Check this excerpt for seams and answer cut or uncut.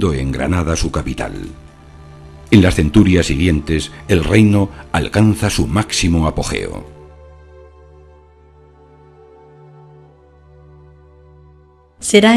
uncut